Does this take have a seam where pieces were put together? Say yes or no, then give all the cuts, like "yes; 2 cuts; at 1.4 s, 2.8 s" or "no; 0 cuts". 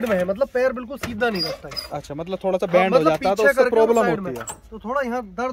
no; 0 cuts